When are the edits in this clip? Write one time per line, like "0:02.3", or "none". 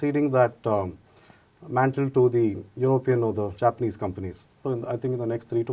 0:04.6